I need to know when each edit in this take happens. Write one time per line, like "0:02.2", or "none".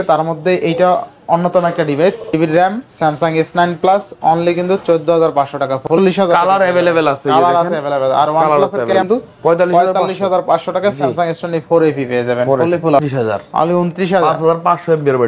0:02.3
0:05.8
0:09.0
0:13.0